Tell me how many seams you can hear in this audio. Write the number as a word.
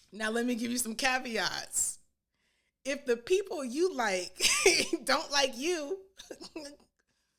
zero